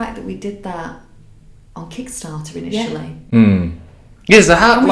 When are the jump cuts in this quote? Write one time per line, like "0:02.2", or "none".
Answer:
none